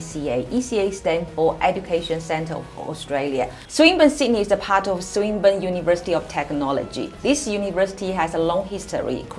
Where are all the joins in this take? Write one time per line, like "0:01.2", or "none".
0:03.5